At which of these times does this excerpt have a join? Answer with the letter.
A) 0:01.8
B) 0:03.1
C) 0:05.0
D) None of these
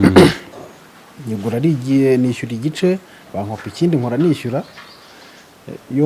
D